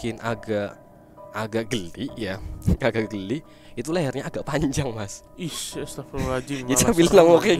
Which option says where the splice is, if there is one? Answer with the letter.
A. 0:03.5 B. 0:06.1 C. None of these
C